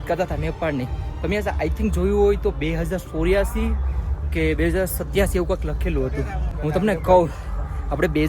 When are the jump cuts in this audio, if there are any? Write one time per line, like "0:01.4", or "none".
0:06.4